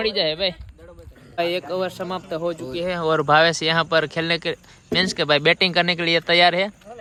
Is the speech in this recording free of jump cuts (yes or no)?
yes